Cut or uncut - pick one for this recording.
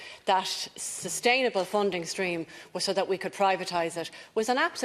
uncut